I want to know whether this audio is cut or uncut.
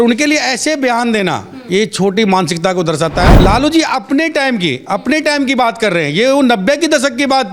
cut